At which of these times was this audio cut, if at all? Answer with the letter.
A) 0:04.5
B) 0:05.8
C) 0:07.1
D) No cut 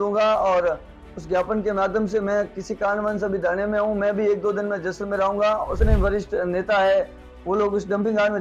B